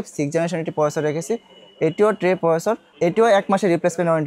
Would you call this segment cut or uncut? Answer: uncut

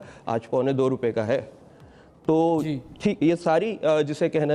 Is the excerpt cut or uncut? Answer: uncut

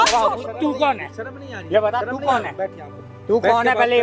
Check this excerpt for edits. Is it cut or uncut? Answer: uncut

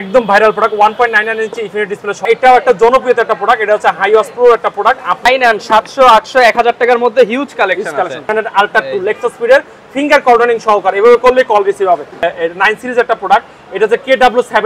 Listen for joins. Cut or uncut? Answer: cut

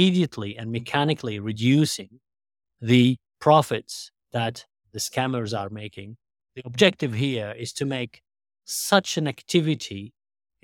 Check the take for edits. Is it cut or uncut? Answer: cut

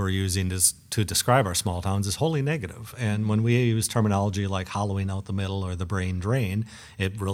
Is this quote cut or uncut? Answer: uncut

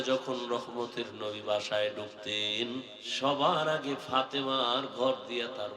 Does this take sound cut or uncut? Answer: cut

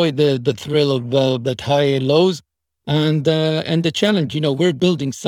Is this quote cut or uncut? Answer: uncut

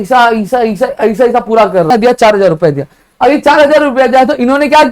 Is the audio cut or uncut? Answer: cut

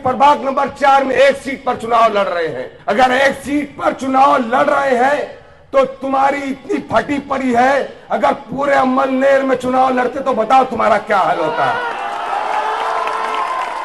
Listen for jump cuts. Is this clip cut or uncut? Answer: cut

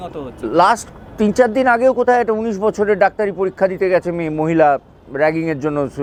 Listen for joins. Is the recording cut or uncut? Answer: uncut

